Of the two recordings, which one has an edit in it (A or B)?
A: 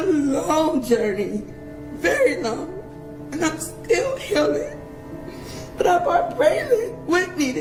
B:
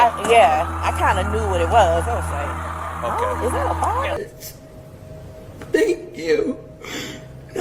B